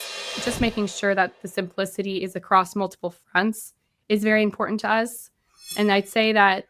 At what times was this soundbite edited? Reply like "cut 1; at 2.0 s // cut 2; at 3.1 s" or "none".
cut 1; at 5.7 s